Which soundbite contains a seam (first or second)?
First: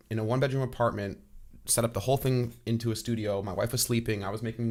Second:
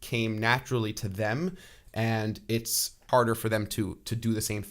second